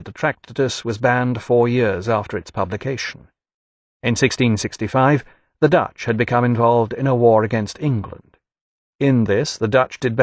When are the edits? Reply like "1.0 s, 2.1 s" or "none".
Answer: 7.7 s